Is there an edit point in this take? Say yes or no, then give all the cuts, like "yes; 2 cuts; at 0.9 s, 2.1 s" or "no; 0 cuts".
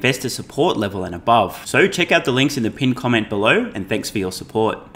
no; 0 cuts